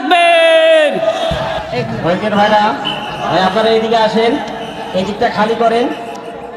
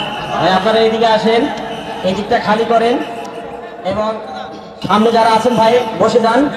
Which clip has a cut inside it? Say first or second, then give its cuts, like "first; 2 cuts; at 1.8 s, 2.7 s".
first; 1 cut; at 1.6 s